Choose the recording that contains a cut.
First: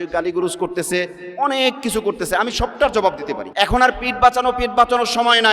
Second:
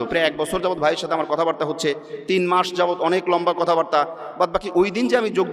first; 1 cut; at 3.4 s

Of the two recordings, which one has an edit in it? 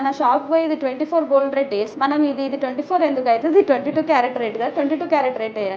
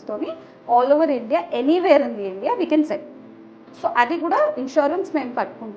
first; 1 cut; at 1.9 s

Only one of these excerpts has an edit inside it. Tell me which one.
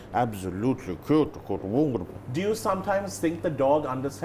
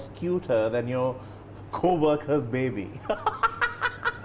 first; 1 cut; at 2.2 s

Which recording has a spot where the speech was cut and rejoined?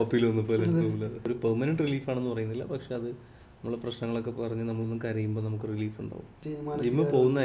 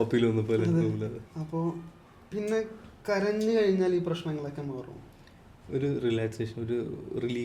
first; 2 cuts; at 1.3 s, 6.4 s

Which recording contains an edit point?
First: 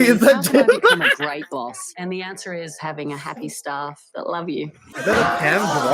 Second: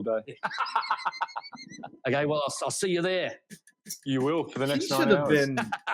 first; 1 cut; at 4.9 s

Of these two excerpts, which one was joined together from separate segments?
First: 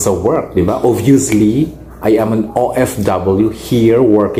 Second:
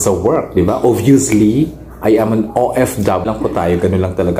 second; 1 cut; at 3.2 s

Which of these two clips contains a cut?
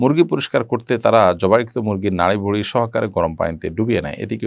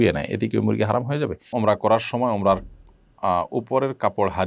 second; 1 cut; at 1.5 s

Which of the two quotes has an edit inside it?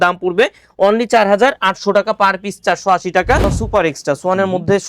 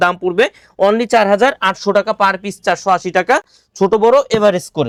first; 1 cut; at 3.6 s

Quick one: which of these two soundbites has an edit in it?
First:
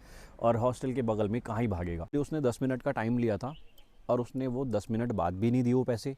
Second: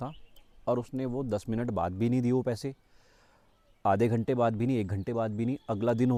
first; 1 cut; at 2.1 s

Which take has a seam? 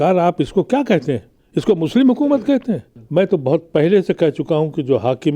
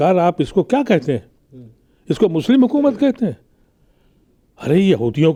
first; 2 cuts; at 1.3 s, 2.9 s

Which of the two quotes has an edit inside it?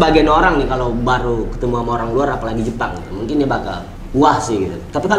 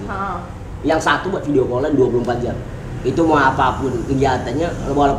second; 1 cut; at 2.6 s

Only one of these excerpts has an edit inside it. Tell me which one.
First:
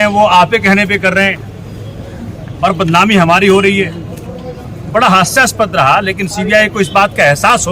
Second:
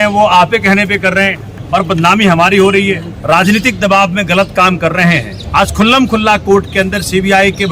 second; 3 cuts; at 1.5 s, 3.1 s, 5.4 s

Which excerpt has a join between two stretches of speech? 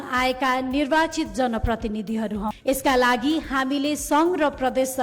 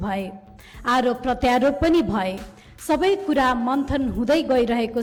first; 1 cut; at 2.6 s

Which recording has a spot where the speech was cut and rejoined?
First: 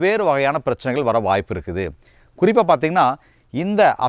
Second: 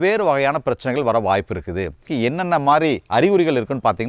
second; 1 cut; at 2.1 s

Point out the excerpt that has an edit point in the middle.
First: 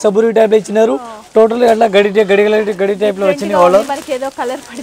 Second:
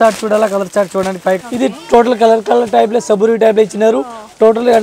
second; 1 cut; at 1.4 s

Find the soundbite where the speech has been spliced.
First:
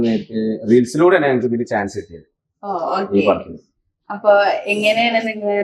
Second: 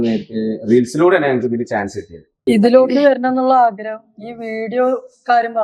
second; 1 cut; at 2.4 s

